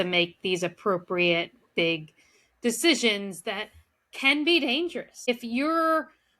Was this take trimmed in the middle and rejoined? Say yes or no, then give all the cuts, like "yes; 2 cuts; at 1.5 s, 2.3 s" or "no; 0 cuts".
yes; 1 cut; at 5.3 s